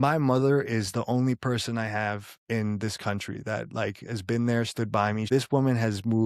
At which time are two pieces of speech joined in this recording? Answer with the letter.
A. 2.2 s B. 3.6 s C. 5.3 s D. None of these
C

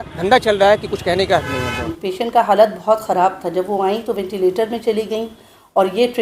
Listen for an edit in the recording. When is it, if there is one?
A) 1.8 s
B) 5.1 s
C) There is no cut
A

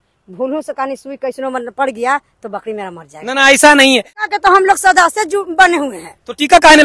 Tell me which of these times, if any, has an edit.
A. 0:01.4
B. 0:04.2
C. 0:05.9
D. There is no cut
B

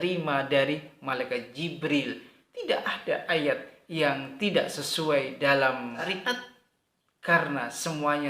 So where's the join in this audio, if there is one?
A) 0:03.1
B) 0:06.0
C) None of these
B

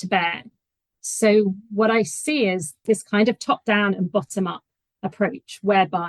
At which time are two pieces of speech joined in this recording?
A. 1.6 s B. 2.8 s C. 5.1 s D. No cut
B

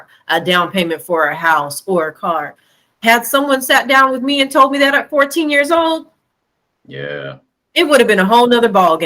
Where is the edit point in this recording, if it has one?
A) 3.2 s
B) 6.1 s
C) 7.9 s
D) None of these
D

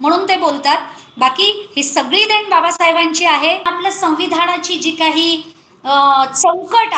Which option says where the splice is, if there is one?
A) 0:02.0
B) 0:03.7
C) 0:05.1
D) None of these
B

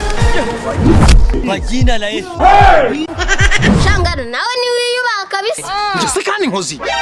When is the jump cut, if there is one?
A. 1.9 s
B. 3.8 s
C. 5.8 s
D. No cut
B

